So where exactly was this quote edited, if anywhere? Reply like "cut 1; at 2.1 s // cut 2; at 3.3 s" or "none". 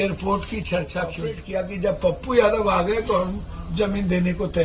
cut 1; at 1.4 s

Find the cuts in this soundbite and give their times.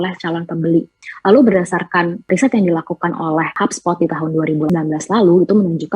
cut 1; at 1.0 s // cut 2; at 2.2 s // cut 3; at 3.5 s // cut 4; at 4.7 s

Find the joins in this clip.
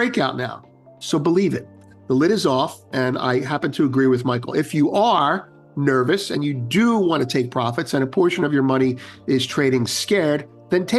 none

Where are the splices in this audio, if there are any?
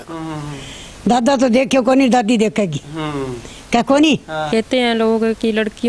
cut 1; at 4.4 s

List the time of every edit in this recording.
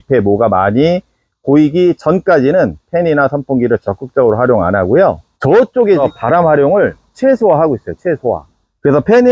cut 1; at 6.0 s

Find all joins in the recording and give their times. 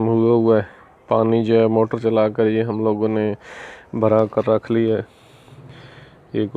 none

